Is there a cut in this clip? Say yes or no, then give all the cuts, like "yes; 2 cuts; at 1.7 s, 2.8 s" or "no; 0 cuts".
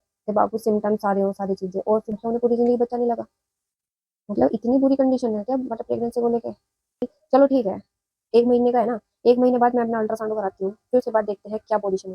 yes; 2 cuts; at 2.1 s, 7.2 s